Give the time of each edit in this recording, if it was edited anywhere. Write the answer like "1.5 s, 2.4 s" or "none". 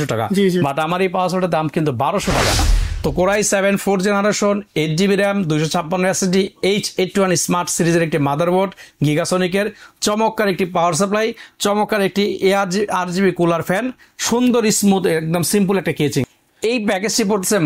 2.6 s, 16.3 s